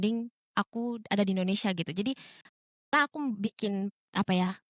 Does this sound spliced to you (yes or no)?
no